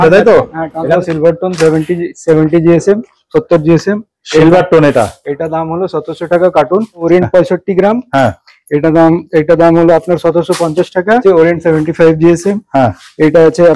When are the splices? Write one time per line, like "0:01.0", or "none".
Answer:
0:01.0
0:07.1
0:11.2